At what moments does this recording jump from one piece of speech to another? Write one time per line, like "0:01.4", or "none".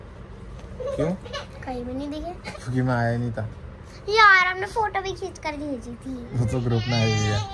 0:02.5